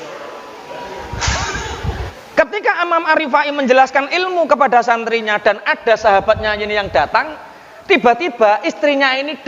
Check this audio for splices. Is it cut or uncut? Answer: cut